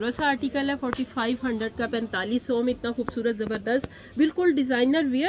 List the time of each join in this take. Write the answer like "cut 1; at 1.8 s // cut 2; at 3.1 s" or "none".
none